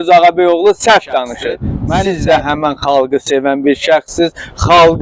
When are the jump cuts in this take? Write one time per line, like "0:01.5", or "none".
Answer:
0:01.8